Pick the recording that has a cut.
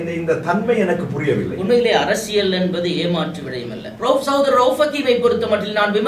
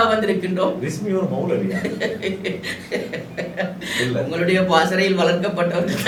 first; 1 cut; at 3.8 s

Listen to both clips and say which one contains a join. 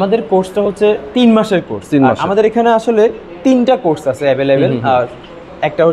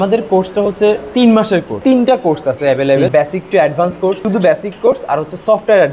second; 3 cuts; at 1.7 s, 3.1 s, 4.2 s

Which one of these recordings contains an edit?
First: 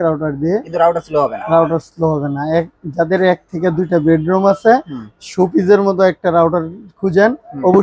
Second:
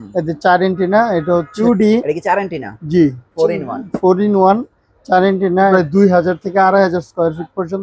second; 2 cuts; at 1.5 s, 5.7 s

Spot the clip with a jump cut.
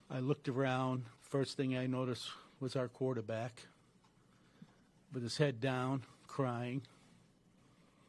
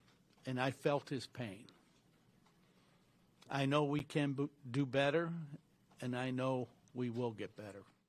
first; 1 cut; at 1.1 s

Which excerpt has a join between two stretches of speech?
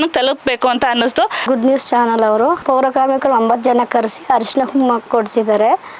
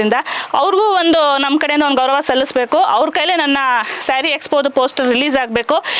first; 3 cuts; at 1.4 s, 2.6 s, 5.1 s

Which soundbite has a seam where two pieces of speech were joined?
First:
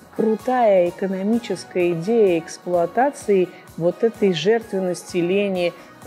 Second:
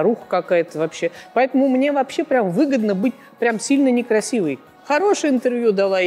second; 2 cuts; at 1.3 s, 4.7 s

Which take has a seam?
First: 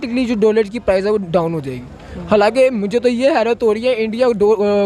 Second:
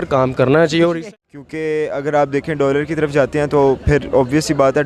second; 1 cut; at 0.9 s

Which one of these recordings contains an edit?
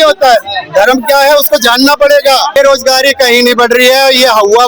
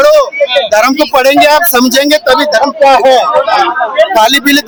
first; 1 cut; at 2.6 s

